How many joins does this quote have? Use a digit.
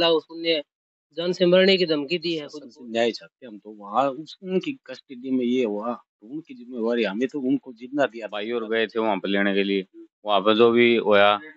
2